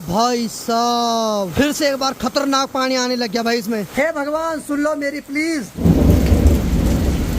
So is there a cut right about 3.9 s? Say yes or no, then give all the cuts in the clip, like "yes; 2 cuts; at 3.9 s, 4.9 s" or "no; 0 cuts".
yes; 3 cuts; at 1.5 s, 3.9 s, 5.8 s